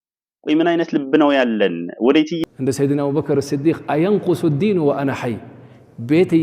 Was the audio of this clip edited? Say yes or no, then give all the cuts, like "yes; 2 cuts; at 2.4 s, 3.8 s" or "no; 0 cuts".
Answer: yes; 1 cut; at 2.4 s